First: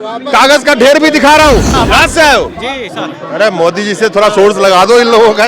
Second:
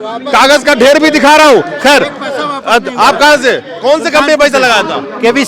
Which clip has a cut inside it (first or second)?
first